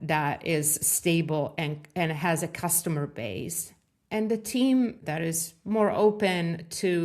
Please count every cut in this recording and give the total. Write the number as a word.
one